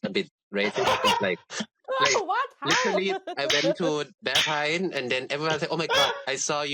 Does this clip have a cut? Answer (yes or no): no